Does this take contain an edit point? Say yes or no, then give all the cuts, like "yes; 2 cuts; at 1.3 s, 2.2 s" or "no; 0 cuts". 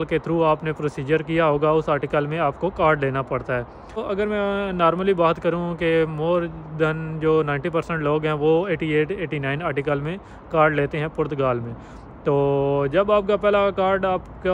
no; 0 cuts